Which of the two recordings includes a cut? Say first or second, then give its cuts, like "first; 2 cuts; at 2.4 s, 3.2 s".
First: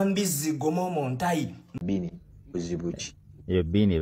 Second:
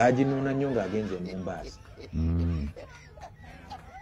first; 1 cut; at 1.6 s